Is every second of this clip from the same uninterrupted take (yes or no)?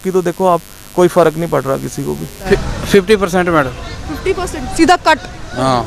yes